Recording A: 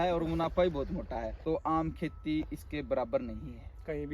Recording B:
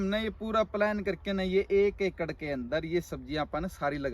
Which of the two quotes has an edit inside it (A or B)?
A